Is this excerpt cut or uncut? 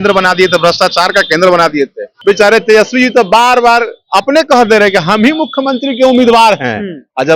cut